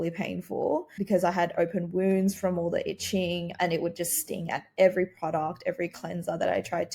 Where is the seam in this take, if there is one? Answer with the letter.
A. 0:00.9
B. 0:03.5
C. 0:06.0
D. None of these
A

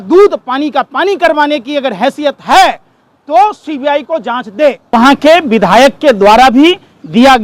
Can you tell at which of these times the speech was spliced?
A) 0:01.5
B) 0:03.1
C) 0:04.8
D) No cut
C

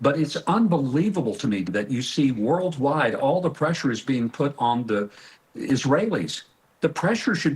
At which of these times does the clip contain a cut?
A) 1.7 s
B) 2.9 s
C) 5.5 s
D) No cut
A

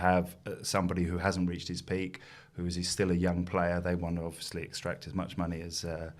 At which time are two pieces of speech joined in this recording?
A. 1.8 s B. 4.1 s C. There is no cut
C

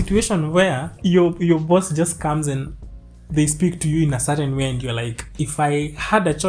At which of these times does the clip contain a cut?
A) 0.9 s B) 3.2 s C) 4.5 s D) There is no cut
A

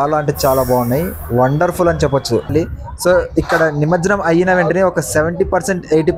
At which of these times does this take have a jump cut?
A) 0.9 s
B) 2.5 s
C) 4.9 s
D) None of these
B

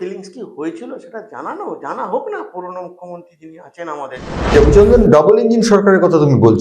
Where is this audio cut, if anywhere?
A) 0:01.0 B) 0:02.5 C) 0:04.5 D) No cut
C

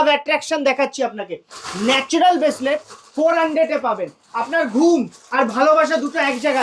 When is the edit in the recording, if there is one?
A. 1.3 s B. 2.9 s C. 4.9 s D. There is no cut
D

